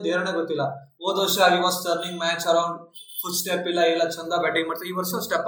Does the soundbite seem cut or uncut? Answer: uncut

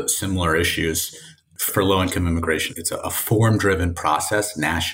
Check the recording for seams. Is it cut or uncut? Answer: cut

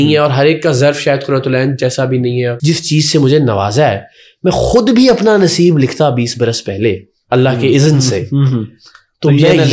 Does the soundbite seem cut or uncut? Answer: cut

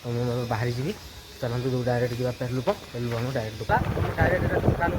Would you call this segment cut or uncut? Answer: cut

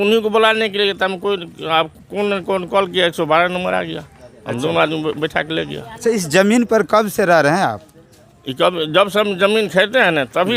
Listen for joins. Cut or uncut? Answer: uncut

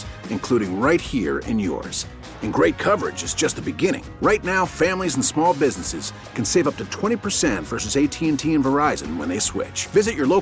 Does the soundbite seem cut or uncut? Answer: uncut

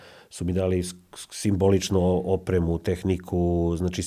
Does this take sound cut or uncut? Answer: uncut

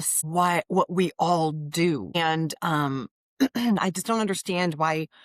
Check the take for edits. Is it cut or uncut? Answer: uncut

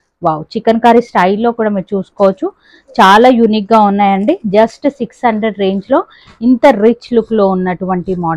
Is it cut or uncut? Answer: uncut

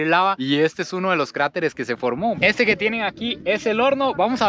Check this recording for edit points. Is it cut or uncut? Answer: cut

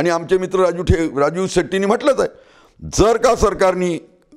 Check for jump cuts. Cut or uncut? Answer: uncut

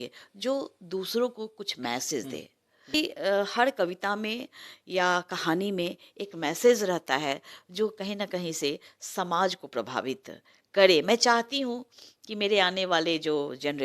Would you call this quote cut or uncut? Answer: cut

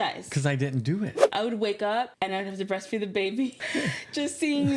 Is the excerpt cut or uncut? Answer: cut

